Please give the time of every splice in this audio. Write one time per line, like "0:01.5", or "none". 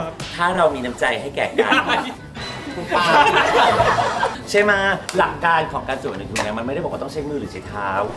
0:04.3